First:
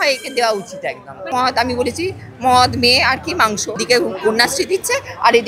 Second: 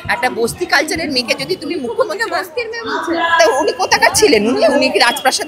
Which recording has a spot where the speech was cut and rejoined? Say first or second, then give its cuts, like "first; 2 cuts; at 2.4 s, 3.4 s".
first; 2 cuts; at 1.2 s, 3.8 s